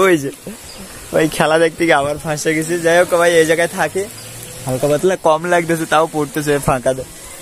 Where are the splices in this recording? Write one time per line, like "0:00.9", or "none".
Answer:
none